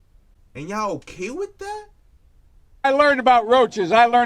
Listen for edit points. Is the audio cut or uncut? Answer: cut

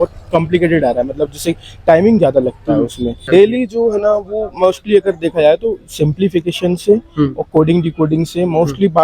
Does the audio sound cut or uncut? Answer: cut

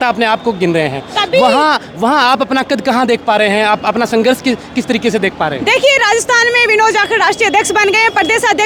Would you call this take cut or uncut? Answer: uncut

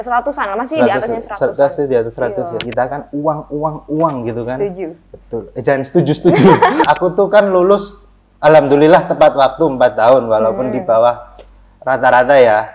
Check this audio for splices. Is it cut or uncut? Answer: cut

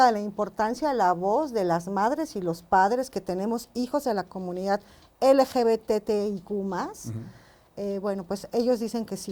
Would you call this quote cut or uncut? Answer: uncut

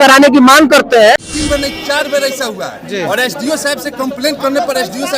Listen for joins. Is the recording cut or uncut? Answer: cut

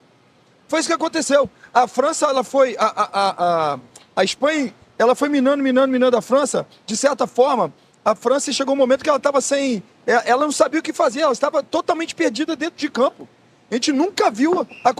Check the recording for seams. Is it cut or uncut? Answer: uncut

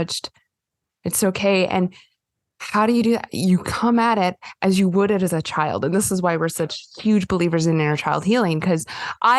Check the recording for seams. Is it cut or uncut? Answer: uncut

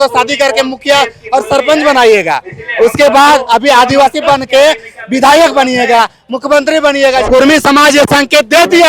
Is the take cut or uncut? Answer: cut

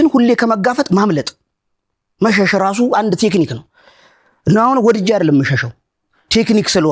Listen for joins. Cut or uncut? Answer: uncut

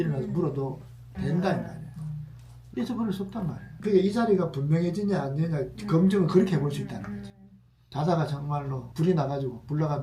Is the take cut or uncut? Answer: cut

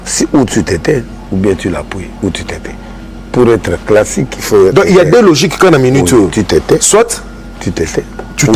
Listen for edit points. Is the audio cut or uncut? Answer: uncut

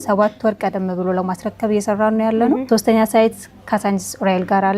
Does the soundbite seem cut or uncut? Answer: cut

